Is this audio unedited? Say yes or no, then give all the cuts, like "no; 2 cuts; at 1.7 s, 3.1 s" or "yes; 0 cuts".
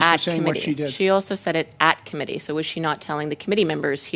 yes; 0 cuts